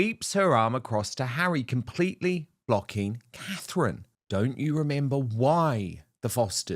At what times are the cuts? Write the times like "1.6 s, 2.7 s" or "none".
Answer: 4.1 s